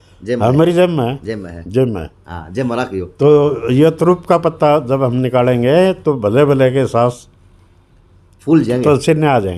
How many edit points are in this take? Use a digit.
0